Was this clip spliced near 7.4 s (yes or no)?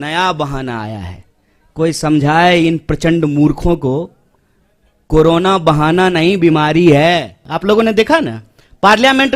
yes